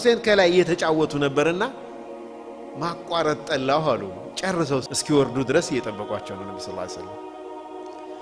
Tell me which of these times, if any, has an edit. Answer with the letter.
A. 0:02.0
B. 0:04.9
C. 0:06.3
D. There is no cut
B